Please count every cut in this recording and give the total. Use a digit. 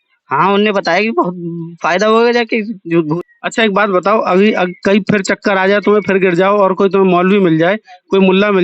1